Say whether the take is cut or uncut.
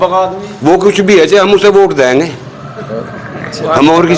uncut